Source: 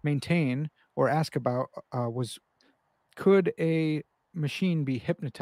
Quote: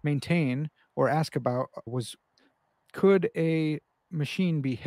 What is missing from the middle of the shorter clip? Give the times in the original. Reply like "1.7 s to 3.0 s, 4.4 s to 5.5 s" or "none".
1.9 s to 2.1 s